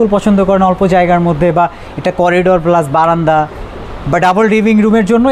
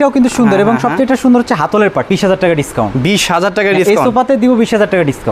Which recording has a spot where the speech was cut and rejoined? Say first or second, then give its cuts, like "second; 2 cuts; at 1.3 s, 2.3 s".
second; 1 cut; at 2.1 s